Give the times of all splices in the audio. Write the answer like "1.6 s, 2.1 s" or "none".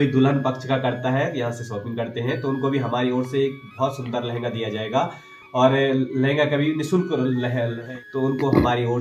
7.8 s

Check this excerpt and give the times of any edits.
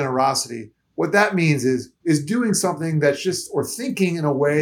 1.9 s

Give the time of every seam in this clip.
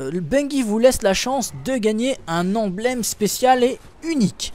none

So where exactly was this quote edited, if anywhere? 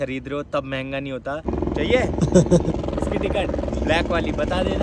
1.5 s

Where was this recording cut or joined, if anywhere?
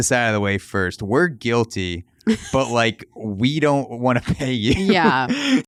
none

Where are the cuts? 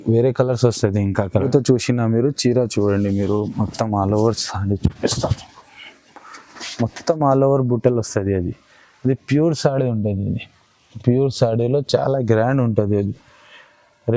1.3 s

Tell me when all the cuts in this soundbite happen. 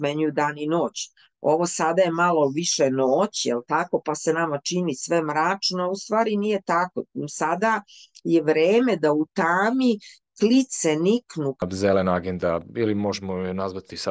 11.6 s

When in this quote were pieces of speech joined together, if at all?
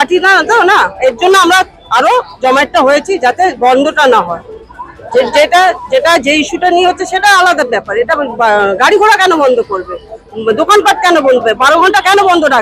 none

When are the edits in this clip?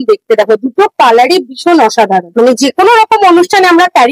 2.3 s

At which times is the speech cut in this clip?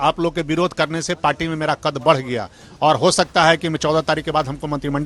none

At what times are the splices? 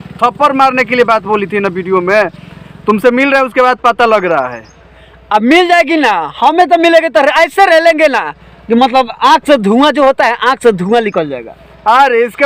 none

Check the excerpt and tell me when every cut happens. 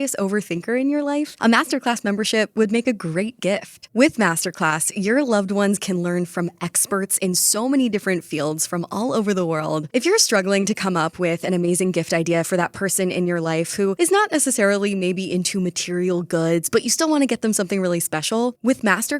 1.3 s, 9.9 s

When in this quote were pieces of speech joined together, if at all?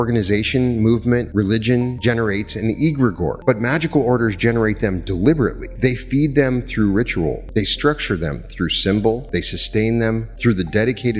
1.7 s, 3.4 s, 5.6 s, 7.4 s, 9.2 s, 10.3 s

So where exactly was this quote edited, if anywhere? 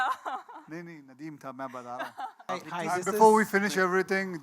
2.5 s

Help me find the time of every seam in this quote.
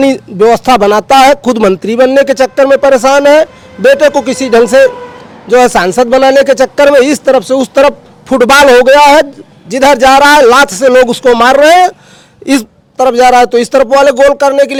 none

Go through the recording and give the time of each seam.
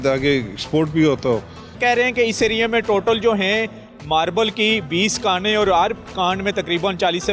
1.8 s

